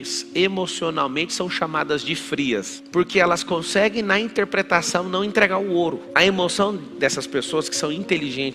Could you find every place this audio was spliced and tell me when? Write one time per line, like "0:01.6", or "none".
0:02.8